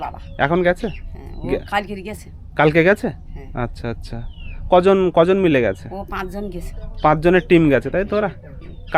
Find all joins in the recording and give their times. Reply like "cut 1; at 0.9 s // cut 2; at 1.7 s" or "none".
none